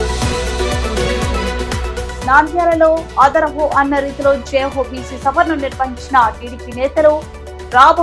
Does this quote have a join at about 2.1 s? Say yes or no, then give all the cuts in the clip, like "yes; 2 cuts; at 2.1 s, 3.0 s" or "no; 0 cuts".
yes; 1 cut; at 2.1 s